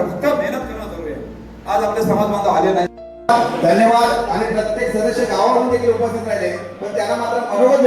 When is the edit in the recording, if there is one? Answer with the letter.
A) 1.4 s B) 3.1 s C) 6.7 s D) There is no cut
B